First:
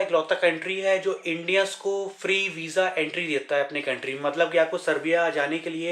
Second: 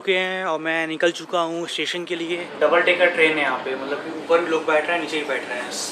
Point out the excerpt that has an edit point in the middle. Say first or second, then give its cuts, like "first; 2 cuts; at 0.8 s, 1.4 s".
second; 1 cut; at 2.5 s